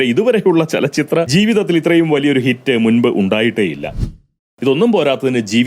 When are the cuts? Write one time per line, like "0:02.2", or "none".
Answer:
0:01.3
0:03.9